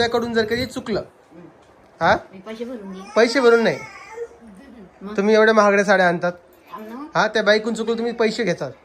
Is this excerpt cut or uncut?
uncut